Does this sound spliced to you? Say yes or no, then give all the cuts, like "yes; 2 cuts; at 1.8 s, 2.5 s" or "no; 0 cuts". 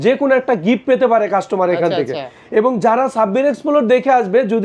no; 0 cuts